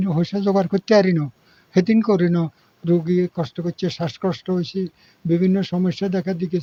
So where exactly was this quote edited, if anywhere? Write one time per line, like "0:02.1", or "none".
none